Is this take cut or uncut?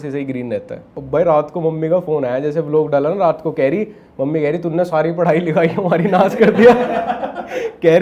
cut